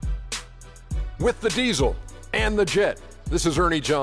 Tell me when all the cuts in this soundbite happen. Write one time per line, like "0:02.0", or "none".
0:01.1